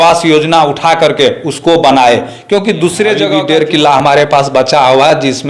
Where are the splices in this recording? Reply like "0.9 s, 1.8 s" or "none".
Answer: 3.2 s